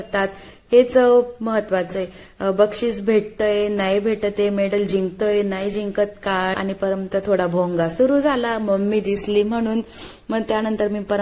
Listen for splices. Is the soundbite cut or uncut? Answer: cut